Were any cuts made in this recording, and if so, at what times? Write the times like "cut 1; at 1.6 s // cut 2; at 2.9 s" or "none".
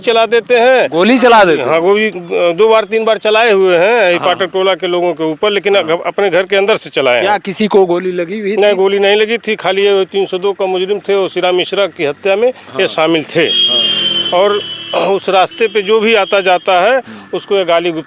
none